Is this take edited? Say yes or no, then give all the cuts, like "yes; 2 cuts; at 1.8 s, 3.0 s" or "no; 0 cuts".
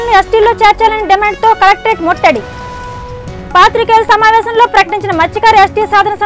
no; 0 cuts